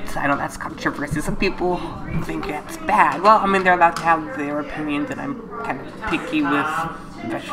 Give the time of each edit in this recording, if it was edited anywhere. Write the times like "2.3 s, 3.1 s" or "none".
none